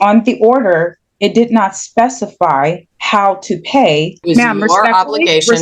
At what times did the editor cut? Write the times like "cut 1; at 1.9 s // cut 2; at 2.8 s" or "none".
cut 1; at 2.9 s // cut 2; at 4.2 s